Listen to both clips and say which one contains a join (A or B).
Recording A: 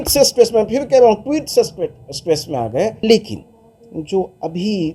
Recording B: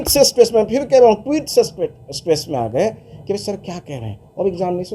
A